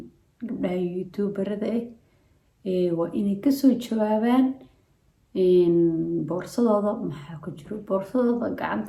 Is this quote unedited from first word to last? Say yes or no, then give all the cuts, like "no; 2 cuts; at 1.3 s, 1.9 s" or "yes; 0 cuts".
yes; 0 cuts